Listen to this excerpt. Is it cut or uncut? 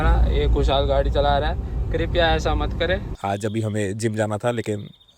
cut